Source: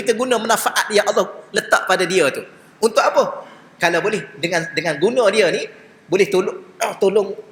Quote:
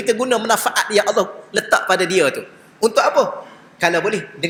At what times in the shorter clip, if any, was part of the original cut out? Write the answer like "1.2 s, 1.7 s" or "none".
none